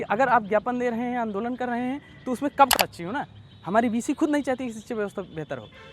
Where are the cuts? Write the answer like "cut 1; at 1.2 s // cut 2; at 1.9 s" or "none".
cut 1; at 2.7 s